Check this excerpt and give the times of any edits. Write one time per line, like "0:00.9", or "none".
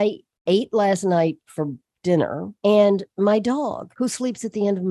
0:02.5
0:03.8